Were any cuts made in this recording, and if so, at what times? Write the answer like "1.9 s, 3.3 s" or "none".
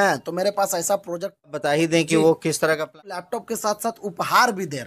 1.5 s, 3.2 s